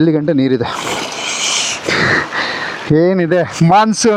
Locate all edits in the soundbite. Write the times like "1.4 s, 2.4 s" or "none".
none